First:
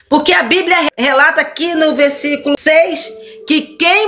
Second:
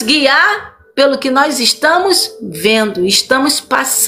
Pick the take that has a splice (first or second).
first